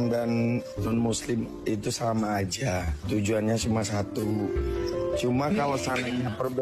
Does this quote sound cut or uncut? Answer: uncut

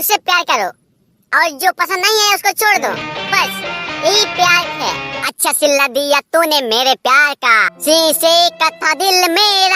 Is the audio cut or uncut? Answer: cut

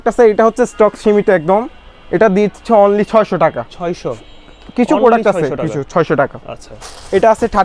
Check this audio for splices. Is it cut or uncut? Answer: uncut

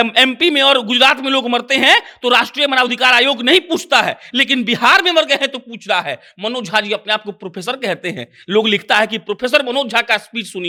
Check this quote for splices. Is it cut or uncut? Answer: uncut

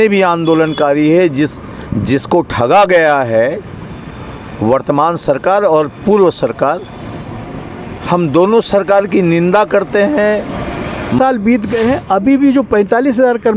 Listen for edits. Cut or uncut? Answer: cut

